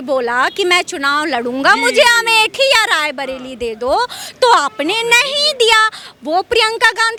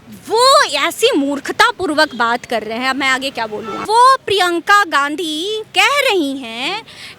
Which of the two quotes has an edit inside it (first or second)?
second